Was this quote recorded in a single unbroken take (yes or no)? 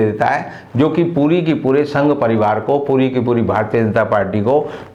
yes